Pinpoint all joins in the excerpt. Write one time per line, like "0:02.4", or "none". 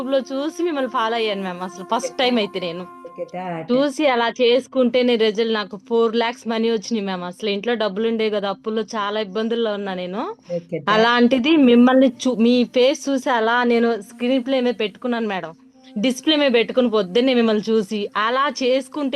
none